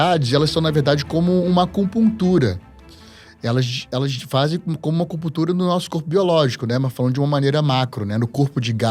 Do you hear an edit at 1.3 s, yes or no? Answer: no